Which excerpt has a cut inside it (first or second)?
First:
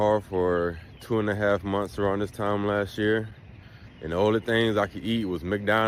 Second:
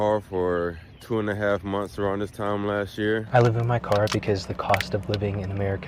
second